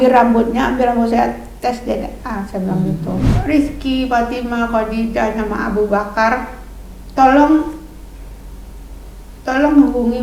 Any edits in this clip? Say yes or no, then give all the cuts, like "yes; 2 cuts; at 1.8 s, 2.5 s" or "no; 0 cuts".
yes; 1 cut; at 3.3 s